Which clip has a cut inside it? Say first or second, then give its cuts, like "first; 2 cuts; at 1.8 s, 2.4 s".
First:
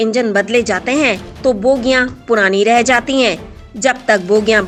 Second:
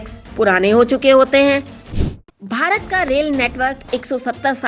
second; 1 cut; at 2.0 s